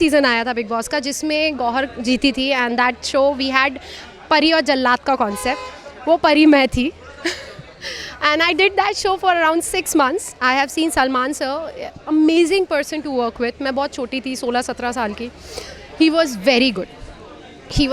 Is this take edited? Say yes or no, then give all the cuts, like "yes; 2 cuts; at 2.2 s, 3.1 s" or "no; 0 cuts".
no; 0 cuts